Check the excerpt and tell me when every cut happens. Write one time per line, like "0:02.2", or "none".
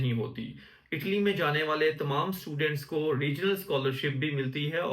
none